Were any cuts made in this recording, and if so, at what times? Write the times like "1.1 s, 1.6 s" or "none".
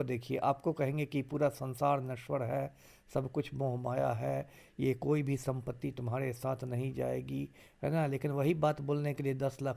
none